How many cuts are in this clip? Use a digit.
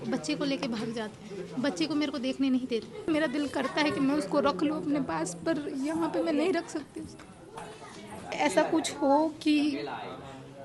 2